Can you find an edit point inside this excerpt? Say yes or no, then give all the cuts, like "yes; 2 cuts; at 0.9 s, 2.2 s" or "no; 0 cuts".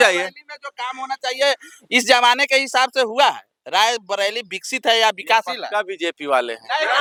no; 0 cuts